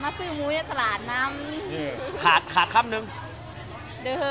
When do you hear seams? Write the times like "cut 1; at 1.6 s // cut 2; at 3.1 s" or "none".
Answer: none